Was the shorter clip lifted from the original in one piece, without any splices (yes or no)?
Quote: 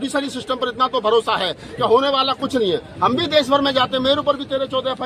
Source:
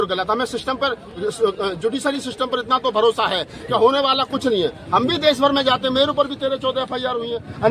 yes